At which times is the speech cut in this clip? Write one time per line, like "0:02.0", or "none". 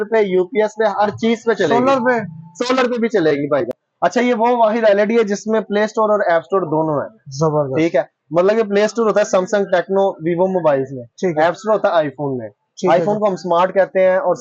0:03.8